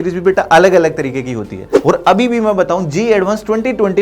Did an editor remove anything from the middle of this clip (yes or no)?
yes